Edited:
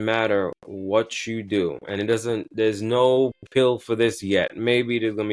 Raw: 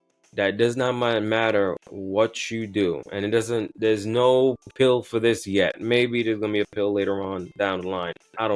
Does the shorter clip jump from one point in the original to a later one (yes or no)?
no